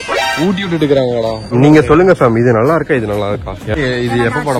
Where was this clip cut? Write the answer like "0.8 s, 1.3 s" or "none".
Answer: 1.4 s, 3.8 s